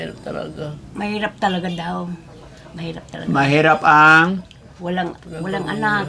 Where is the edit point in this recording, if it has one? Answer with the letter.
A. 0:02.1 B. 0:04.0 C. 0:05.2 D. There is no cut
D